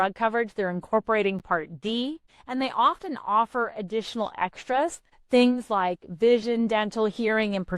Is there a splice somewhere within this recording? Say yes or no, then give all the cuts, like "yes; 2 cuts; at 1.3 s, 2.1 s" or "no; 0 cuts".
yes; 2 cuts; at 2.3 s, 5.1 s